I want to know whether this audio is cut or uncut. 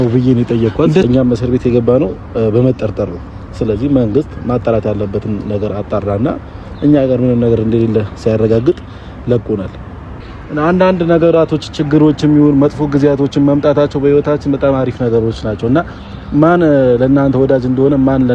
cut